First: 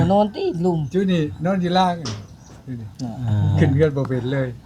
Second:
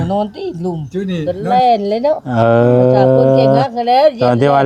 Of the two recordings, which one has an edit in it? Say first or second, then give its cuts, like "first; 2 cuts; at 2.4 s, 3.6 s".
second; 1 cut; at 1.2 s